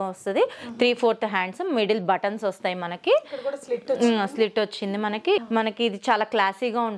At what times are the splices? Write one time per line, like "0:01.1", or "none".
0:05.4